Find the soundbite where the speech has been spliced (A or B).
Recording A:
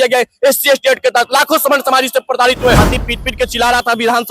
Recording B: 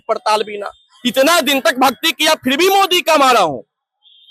A